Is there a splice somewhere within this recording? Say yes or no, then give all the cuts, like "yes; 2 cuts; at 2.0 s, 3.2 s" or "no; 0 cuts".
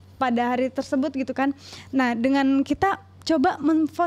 no; 0 cuts